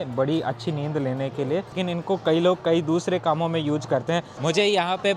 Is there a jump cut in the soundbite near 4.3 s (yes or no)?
yes